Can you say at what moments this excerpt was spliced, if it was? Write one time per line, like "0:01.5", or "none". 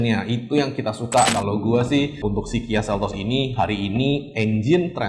0:01.3